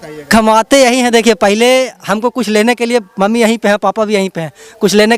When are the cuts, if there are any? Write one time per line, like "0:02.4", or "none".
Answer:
none